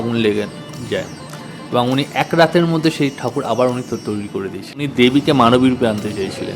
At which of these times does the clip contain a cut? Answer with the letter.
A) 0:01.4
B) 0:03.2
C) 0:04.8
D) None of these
C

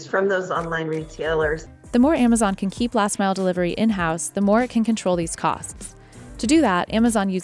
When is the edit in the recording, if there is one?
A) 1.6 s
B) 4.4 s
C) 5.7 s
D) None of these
A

